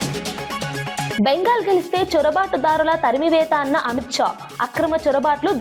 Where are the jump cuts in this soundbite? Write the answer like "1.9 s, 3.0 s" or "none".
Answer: 1.2 s